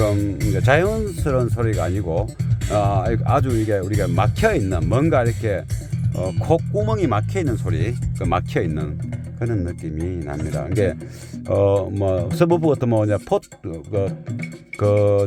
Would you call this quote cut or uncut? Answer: uncut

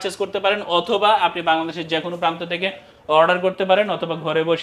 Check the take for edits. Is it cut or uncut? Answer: uncut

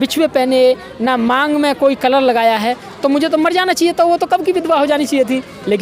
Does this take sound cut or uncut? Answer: uncut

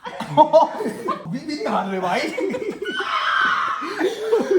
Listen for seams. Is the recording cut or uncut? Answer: cut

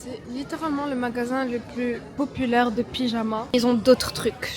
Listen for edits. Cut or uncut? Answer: cut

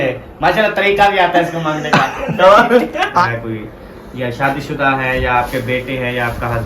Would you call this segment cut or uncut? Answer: cut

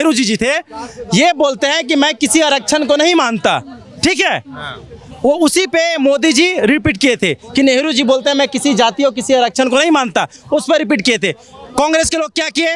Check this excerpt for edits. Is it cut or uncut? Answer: uncut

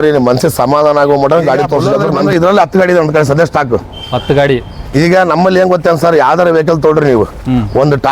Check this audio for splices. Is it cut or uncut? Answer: cut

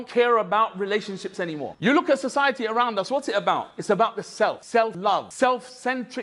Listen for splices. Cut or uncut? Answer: uncut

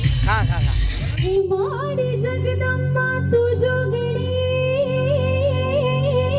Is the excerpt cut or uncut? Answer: cut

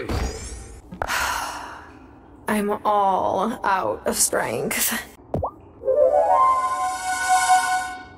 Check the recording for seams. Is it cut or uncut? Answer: cut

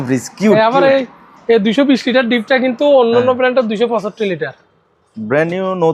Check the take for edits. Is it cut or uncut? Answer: uncut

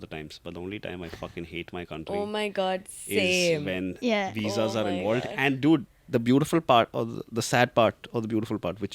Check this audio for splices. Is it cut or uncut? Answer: uncut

